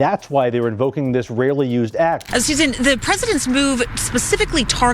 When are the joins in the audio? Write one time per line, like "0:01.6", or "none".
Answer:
0:02.2